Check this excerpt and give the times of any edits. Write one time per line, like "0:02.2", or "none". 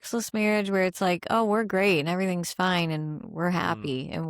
none